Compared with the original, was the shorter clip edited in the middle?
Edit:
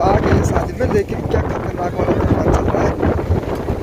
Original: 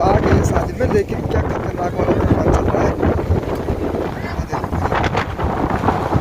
no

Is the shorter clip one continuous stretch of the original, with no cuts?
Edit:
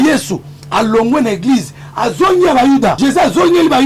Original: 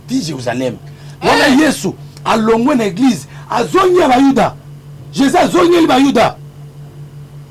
no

